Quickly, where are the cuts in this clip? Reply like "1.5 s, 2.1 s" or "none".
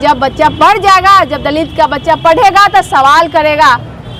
none